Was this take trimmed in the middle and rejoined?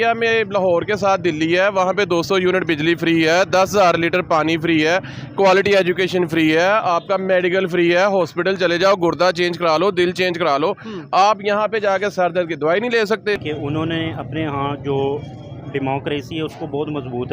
yes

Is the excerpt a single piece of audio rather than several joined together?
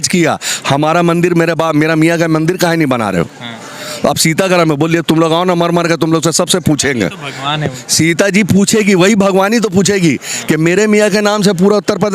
yes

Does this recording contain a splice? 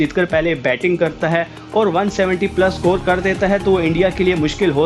no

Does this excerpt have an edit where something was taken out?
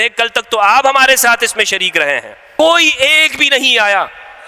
yes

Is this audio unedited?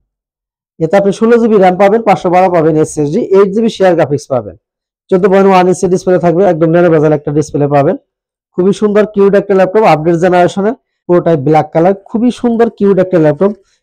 no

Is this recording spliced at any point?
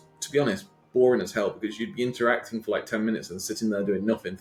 no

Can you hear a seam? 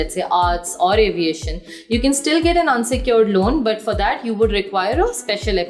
no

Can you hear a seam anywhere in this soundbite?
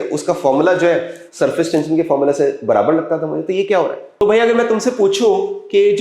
yes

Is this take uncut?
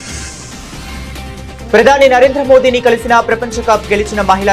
no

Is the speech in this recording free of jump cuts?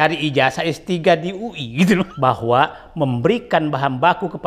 no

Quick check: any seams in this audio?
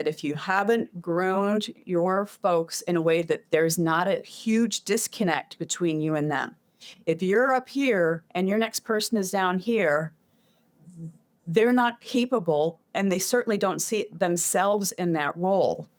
no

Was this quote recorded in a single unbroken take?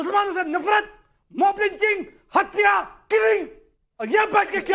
yes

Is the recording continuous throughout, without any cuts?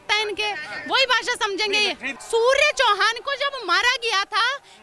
no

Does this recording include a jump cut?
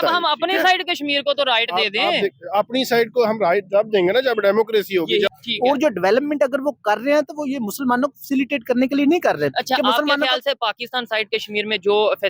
yes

